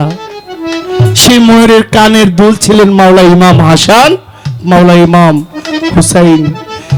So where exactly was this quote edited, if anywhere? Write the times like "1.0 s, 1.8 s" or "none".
none